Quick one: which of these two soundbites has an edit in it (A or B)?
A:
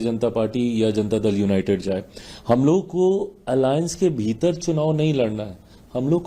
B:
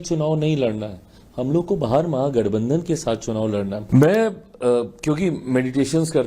B